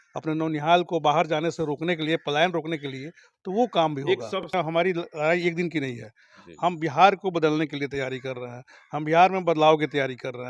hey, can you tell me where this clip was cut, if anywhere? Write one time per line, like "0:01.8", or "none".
0:04.5